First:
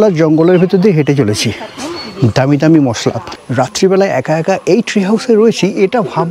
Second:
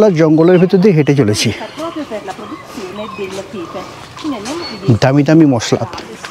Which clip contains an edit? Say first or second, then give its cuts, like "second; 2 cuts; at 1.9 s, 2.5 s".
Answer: first; 2 cuts; at 1.8 s, 3.3 s